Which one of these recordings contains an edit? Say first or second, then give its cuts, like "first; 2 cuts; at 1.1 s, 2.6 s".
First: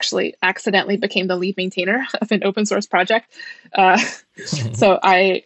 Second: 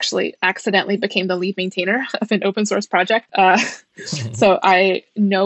second; 1 cut; at 3.3 s